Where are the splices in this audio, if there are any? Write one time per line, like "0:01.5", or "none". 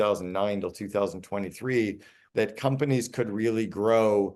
0:02.2